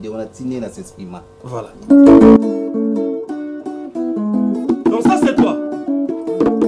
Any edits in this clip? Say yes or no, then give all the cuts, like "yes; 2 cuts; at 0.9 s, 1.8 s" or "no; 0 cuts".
no; 0 cuts